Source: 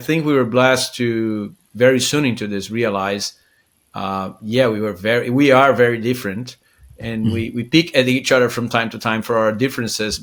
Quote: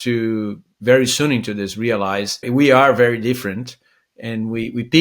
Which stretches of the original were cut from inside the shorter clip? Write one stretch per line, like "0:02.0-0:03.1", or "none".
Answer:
0:03.4-0:05.3

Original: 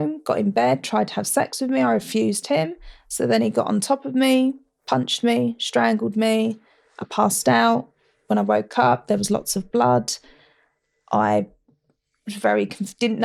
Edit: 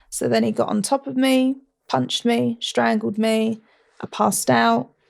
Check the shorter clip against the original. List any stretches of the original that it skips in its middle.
none

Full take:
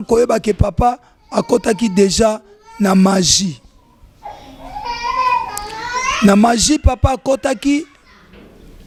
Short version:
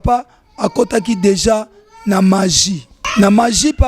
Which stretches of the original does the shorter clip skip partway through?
0:03.7-0:06.0

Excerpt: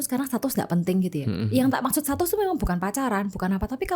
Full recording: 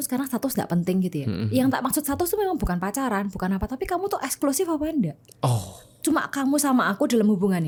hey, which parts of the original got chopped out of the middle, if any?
none

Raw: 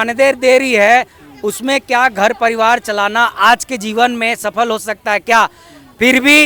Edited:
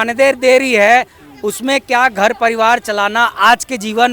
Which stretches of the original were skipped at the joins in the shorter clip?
none

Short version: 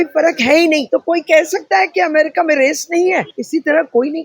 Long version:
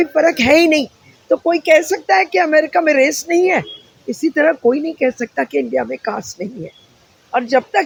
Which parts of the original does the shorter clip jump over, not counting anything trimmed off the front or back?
0:00.8-0:01.2
0:03.7-0:04.1

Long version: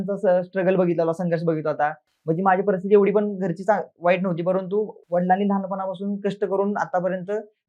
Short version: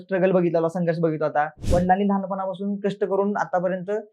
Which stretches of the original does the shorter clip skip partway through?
0:02.0-0:05.0

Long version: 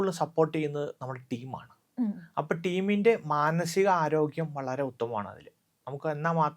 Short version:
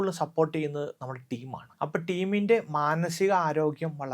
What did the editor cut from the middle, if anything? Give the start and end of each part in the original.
0:01.7-0:02.2

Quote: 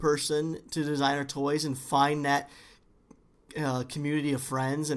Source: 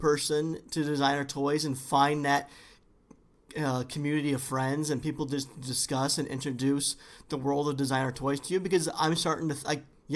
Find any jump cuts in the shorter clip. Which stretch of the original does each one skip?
none

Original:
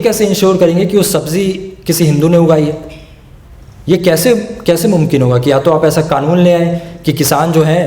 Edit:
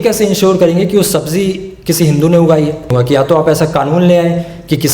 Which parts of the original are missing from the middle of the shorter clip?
0:02.9-0:05.3

